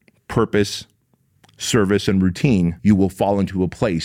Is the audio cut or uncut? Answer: cut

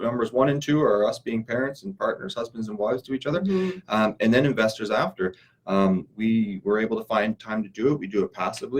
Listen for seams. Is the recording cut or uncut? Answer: uncut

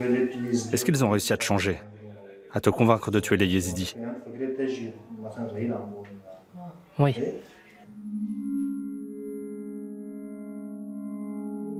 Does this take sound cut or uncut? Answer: uncut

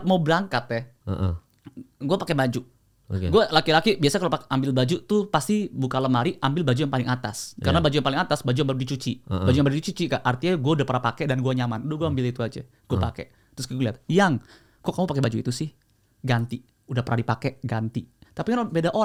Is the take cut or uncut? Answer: uncut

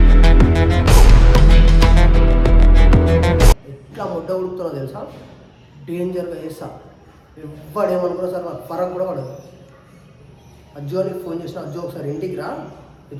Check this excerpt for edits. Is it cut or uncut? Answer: uncut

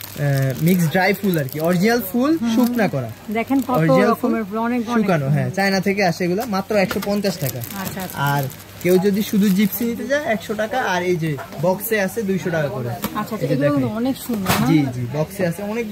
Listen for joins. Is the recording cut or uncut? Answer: uncut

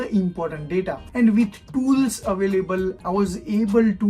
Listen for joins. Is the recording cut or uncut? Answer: cut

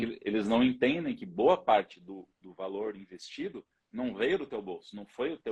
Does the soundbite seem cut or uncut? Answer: uncut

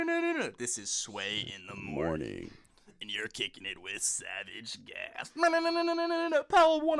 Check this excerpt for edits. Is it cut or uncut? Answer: uncut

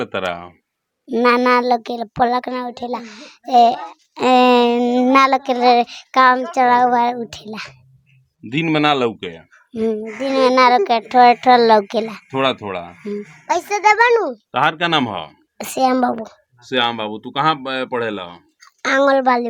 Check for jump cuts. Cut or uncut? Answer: uncut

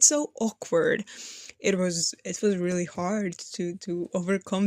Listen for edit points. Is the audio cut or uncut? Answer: uncut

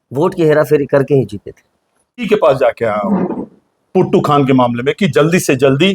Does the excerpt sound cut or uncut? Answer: cut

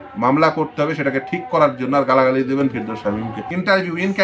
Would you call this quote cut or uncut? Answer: cut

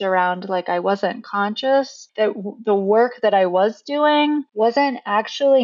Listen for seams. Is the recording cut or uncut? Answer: cut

